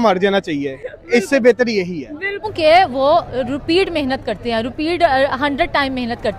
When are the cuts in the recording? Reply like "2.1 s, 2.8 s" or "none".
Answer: none